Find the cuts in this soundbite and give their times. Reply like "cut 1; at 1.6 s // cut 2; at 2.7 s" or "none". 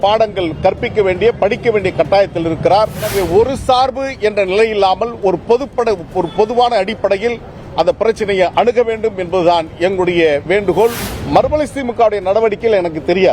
cut 1; at 3.1 s // cut 2; at 11.1 s

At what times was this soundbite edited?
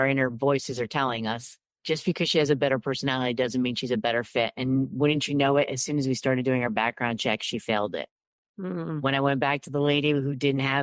cut 1; at 1.7 s

